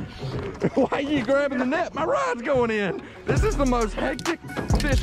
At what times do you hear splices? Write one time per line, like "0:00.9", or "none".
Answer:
none